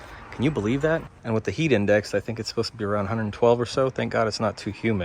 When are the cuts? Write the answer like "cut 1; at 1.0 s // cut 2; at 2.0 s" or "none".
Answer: cut 1; at 1.1 s